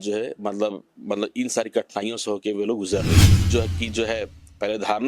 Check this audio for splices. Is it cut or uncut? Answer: cut